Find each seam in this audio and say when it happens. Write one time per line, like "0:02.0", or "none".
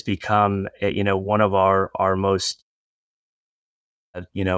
none